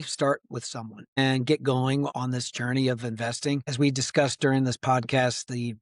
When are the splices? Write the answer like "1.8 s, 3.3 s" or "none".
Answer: 1.2 s, 2.1 s, 3.7 s

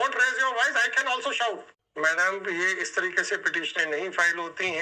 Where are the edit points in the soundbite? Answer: 1.8 s

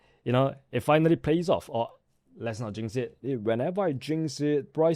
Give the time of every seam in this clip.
3.2 s

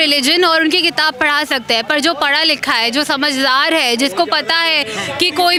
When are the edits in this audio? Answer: none

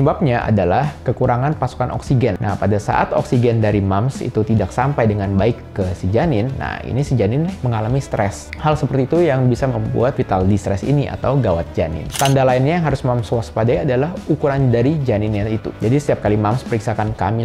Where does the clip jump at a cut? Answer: 2.4 s, 12.0 s

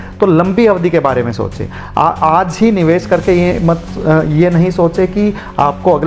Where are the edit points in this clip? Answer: none

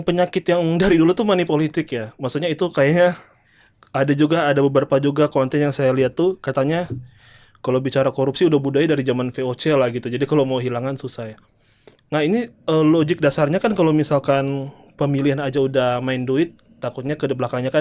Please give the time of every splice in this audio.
none

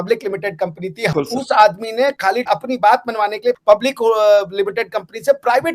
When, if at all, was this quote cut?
1.1 s, 3.5 s

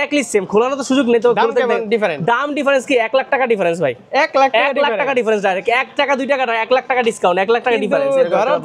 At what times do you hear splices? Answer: none

